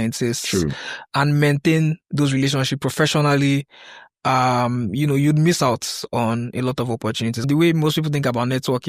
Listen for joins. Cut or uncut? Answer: cut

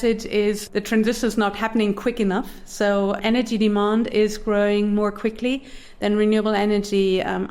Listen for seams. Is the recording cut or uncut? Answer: cut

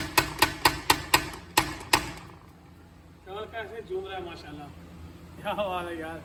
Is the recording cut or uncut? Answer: uncut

